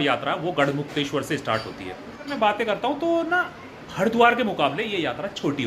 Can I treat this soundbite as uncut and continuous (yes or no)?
no